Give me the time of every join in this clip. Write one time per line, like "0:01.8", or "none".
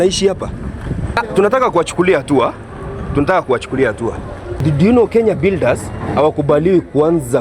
0:01.2
0:04.6